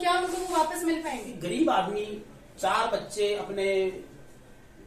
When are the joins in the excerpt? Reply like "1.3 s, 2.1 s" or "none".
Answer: 1.3 s